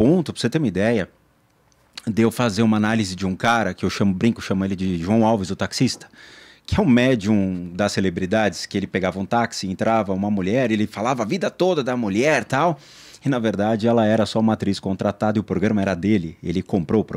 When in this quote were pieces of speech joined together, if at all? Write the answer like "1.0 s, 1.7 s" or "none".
none